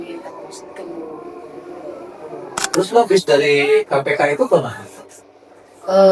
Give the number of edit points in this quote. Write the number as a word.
one